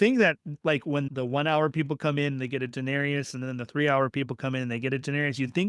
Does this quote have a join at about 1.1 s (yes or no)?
yes